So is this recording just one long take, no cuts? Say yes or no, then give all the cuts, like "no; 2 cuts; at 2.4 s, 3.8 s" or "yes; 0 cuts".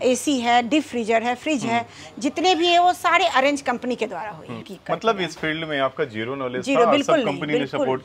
no; 1 cut; at 4.7 s